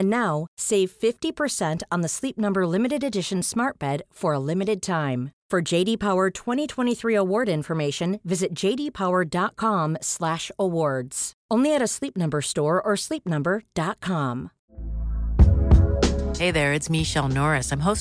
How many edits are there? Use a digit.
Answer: 1